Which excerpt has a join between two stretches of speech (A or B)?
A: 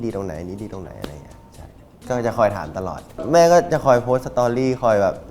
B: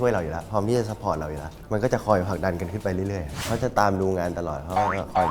B